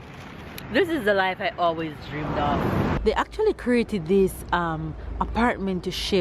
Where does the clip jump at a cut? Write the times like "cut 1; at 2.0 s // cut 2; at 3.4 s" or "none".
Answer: cut 1; at 3.0 s